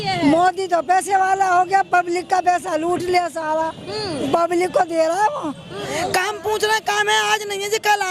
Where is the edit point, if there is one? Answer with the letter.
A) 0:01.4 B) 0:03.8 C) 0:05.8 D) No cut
C